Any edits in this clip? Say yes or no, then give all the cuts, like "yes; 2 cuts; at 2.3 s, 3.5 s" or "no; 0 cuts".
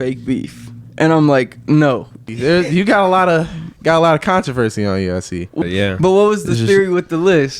yes; 2 cuts; at 2.1 s, 5.6 s